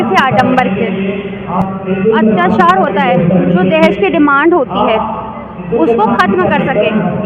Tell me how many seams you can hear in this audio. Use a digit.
1